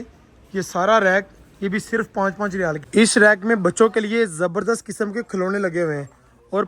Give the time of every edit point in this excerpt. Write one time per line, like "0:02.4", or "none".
0:02.8